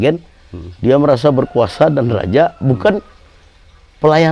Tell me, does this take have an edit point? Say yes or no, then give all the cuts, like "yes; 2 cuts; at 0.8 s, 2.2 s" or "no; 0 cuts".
no; 0 cuts